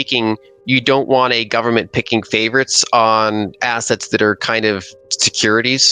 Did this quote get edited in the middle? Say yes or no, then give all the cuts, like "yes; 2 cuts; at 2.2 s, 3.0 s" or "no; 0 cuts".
no; 0 cuts